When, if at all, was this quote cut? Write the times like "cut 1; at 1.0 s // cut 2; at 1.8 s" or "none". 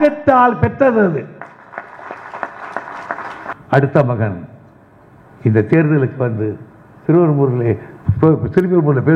cut 1; at 3.5 s